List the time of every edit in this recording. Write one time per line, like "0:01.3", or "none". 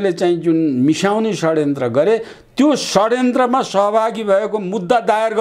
none